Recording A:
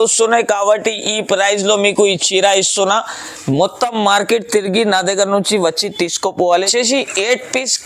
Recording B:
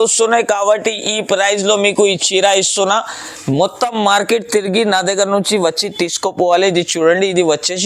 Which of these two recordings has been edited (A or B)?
A